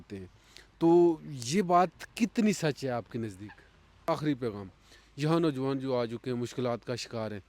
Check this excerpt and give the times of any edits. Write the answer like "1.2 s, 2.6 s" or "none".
4.0 s